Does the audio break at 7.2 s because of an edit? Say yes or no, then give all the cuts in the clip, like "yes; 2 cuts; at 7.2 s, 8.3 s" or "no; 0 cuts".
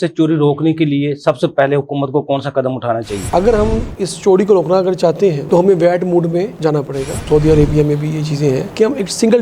yes; 2 cuts; at 3.2 s, 7.2 s